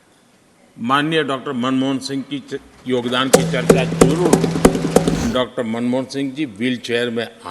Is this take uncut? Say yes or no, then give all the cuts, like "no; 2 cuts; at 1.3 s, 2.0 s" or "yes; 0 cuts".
no; 1 cut; at 5.2 s